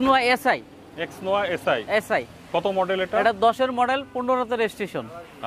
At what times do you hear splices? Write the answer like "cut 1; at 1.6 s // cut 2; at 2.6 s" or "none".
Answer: none